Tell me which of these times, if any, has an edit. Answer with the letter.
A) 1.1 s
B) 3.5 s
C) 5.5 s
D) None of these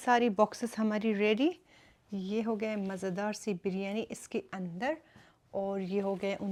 D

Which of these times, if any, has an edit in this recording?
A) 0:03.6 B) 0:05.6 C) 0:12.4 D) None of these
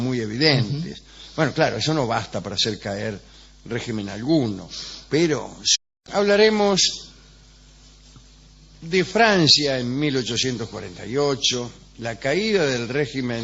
D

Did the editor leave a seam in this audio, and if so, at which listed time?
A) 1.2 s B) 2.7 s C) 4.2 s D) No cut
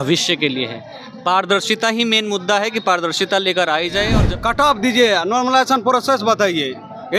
C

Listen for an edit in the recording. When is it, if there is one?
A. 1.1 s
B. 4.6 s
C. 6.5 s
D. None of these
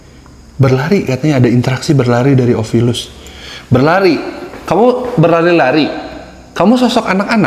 D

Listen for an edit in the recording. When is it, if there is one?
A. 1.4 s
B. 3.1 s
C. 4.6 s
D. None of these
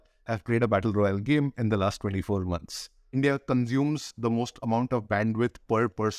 B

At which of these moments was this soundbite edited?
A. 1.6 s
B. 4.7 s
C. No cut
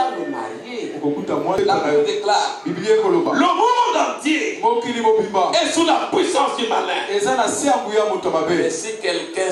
A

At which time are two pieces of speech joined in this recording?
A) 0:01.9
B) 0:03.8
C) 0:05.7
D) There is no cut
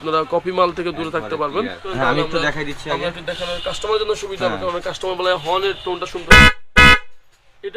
A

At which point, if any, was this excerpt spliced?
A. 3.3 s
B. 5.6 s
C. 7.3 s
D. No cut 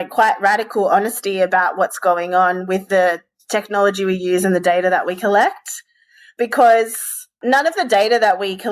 D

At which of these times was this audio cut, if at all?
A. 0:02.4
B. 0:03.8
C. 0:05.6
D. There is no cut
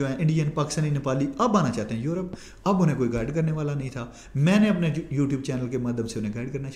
D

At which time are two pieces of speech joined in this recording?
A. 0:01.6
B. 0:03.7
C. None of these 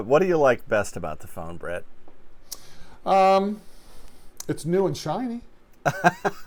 C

